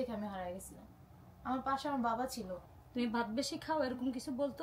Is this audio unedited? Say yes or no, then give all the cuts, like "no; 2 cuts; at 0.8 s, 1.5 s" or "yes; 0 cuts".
no; 1 cut; at 2.6 s